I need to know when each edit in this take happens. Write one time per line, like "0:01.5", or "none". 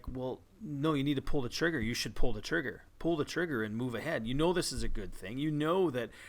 0:02.4

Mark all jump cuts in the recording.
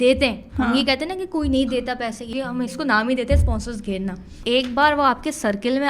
0:02.3
0:04.4

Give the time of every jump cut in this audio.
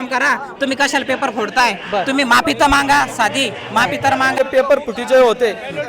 0:04.4

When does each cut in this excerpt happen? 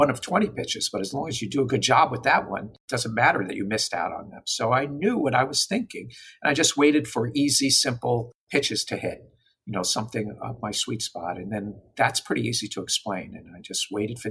0:02.8

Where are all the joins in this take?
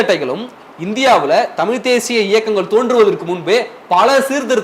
none

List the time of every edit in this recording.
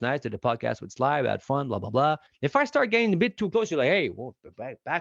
0:02.3

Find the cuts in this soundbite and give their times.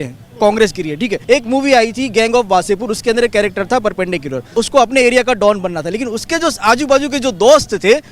0:01.2
0:04.5

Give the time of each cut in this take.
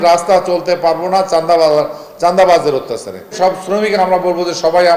0:03.3

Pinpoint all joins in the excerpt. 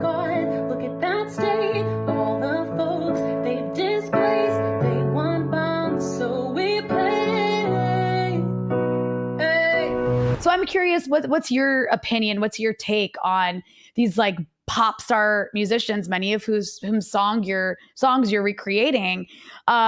0:10.3

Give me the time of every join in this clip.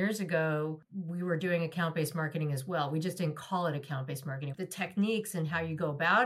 0:00.9
0:04.4

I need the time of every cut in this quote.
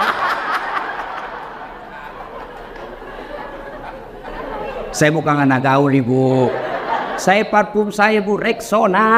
0:04.3

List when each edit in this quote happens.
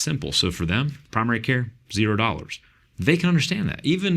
0:01.0

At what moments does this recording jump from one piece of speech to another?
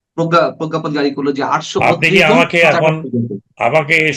none

